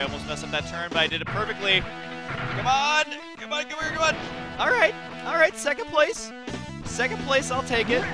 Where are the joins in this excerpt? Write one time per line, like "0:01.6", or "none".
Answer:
0:02.9

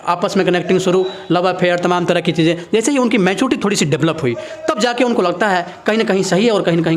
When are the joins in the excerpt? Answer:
none

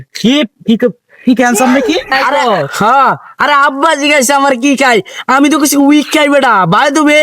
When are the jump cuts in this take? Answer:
0:02.2

